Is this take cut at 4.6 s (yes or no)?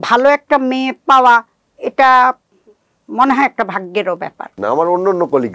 yes